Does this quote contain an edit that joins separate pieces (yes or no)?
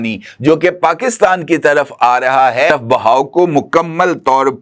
yes